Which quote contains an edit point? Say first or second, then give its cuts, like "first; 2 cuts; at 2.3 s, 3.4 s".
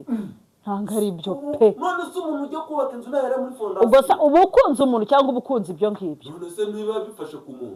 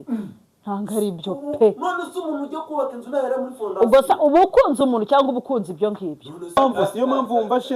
second; 1 cut; at 6.6 s